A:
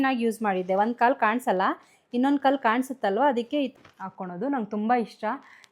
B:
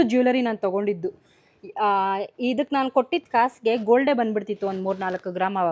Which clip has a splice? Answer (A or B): A